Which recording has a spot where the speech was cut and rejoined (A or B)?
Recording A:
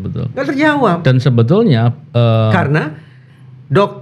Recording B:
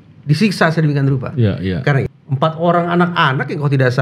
B